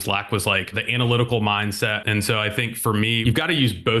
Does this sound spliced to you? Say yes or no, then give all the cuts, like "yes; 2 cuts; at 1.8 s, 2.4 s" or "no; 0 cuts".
yes; 2 cuts; at 2.0 s, 3.2 s